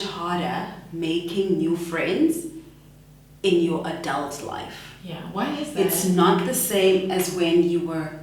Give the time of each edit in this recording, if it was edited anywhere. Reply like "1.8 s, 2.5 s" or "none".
none